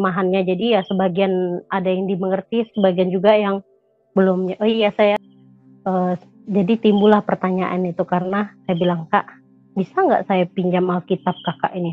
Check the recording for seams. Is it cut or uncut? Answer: cut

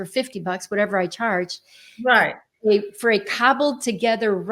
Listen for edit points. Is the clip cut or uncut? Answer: uncut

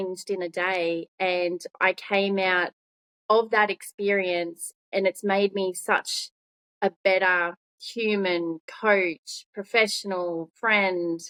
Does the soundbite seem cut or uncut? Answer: uncut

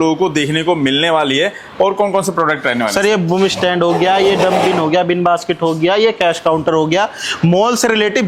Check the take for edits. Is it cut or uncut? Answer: uncut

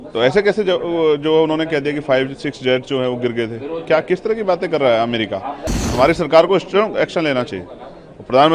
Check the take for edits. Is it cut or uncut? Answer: cut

